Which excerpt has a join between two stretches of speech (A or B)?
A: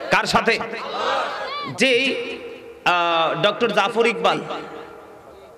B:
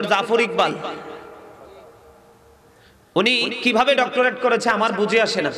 A